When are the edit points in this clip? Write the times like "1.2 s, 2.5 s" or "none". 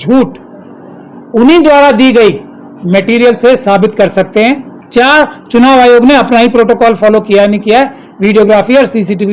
4.7 s